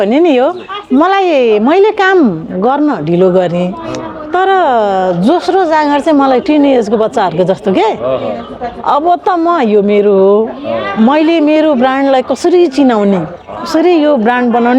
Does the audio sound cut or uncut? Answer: uncut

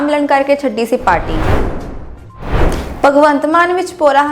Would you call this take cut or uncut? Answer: cut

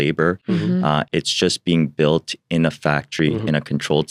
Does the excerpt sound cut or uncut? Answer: uncut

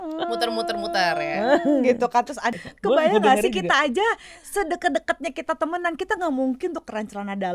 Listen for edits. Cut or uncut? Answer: cut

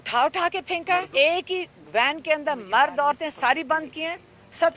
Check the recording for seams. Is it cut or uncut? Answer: cut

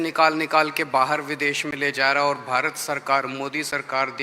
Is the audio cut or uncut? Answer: uncut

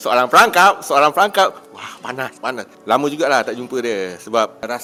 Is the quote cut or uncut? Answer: uncut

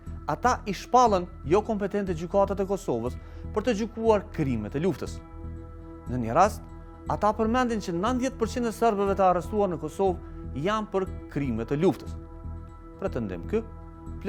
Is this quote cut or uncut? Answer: uncut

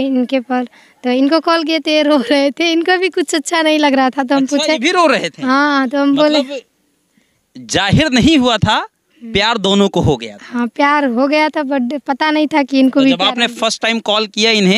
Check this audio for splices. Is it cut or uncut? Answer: uncut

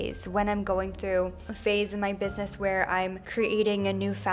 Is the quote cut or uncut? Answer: cut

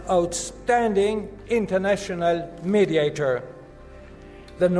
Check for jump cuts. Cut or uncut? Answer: uncut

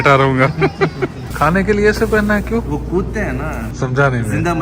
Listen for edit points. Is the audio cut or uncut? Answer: cut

